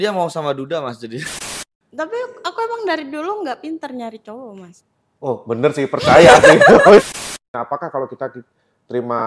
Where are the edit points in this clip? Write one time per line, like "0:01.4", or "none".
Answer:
0:01.3
0:07.0